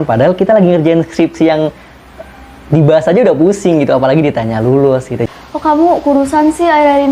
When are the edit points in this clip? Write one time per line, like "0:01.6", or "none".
0:05.2